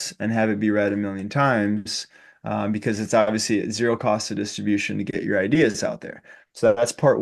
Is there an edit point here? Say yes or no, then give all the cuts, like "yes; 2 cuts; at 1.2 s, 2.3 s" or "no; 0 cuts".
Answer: no; 0 cuts